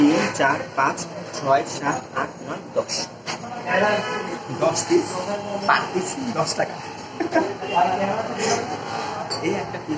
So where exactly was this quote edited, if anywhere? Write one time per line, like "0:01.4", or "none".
none